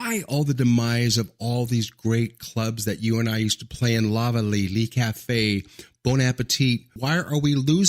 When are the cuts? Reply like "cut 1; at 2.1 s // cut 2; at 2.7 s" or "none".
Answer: cut 1; at 6.9 s

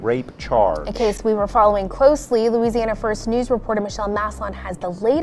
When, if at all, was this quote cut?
cut 1; at 1.2 s

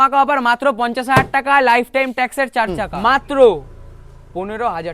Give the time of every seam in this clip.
cut 1; at 2.9 s

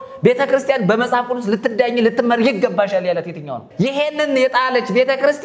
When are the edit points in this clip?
cut 1; at 3.6 s

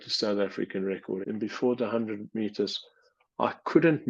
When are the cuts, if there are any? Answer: cut 1; at 1.2 s

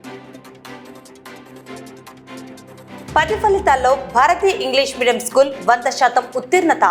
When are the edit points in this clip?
none

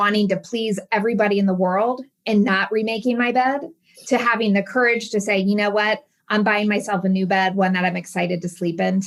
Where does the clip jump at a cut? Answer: none

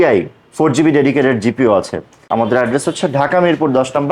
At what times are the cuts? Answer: cut 1; at 2.2 s

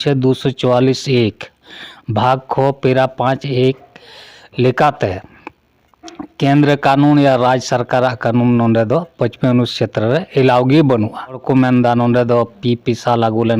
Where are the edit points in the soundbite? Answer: cut 1; at 11.4 s

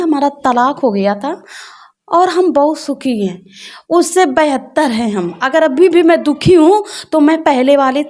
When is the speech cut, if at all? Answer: none

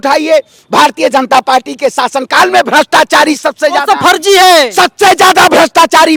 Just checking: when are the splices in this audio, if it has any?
none

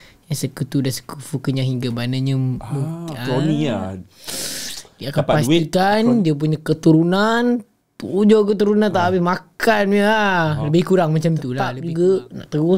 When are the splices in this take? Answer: cut 1; at 11.8 s

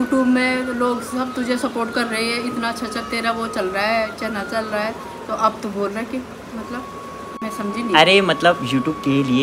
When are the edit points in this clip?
none

